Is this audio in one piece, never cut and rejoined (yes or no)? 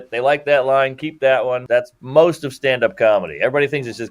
no